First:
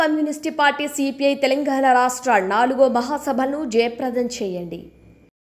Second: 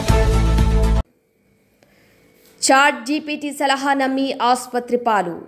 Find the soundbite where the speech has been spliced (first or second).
second